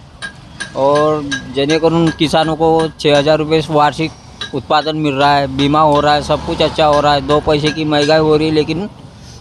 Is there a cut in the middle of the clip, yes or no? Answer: no